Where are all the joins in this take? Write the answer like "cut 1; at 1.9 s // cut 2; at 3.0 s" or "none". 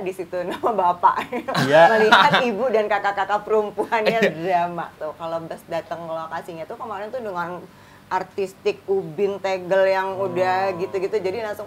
cut 1; at 4.9 s

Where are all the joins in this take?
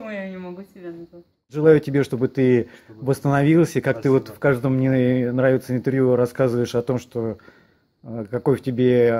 cut 1; at 1.5 s

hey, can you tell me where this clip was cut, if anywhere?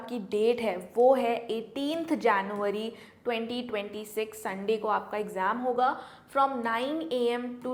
none

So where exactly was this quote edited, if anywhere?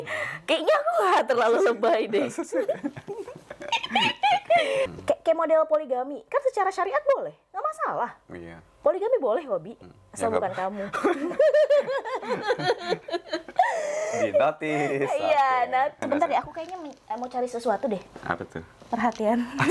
cut 1; at 4.9 s // cut 2; at 16.0 s

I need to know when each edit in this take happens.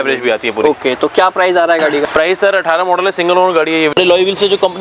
cut 1; at 2.0 s // cut 2; at 3.9 s

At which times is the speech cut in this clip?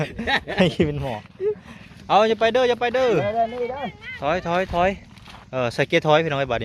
cut 1; at 1.7 s

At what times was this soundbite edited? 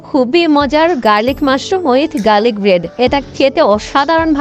none

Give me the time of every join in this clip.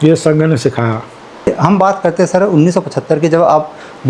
cut 1; at 1.5 s

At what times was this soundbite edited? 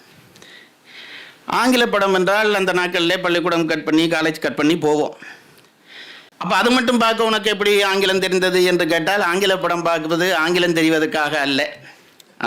none

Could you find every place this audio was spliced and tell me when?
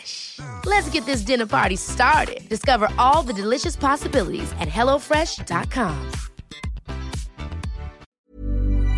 cut 1; at 8.1 s

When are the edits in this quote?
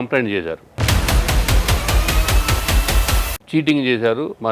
cut 1; at 3.3 s

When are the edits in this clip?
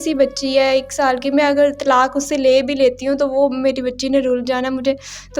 none

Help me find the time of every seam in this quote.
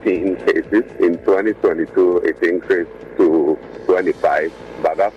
cut 1; at 0.9 s // cut 2; at 3.0 s // cut 3; at 3.7 s

